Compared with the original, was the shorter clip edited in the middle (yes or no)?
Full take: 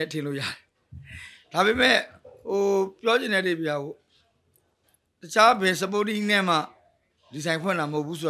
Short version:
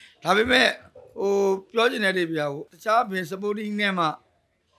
yes